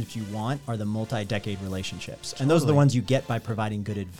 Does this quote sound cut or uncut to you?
uncut